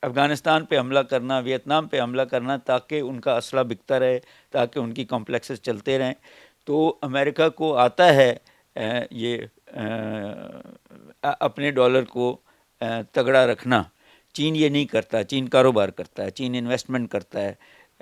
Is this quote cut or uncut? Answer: uncut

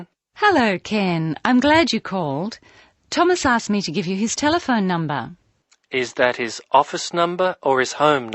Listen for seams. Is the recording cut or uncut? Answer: uncut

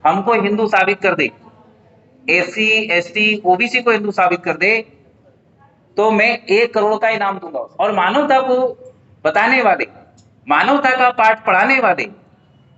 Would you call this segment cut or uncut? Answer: cut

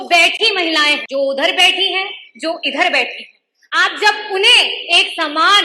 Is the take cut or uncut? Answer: cut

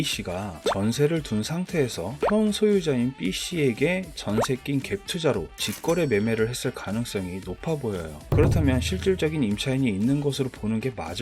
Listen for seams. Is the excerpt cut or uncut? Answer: uncut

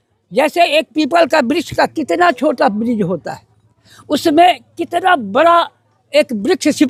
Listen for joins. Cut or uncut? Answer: uncut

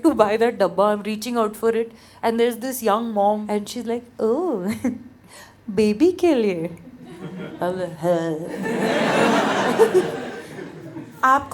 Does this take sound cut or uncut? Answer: cut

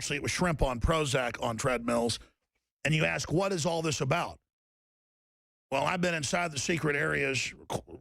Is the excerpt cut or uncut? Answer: cut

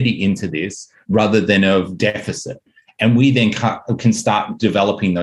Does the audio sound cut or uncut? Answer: uncut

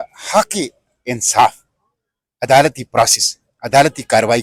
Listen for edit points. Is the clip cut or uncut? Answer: uncut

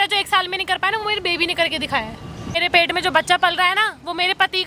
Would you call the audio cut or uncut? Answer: uncut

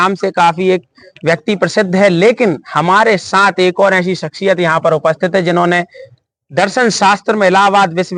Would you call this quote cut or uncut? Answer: uncut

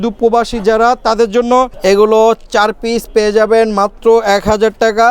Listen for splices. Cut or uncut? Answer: cut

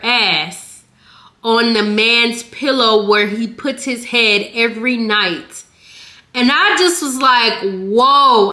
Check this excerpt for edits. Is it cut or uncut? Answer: uncut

